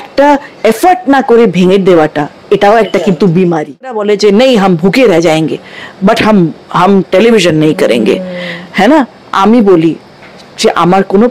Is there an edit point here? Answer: yes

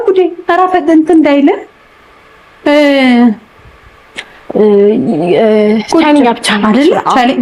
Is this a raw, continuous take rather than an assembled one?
yes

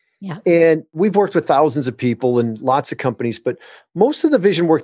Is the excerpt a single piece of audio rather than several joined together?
no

